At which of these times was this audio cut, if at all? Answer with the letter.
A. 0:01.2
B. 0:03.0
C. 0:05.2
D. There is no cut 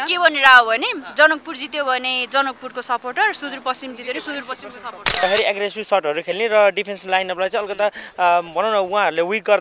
C